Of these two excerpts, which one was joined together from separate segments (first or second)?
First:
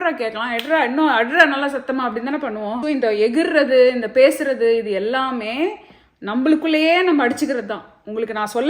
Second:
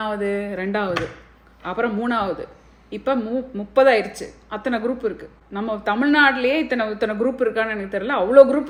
first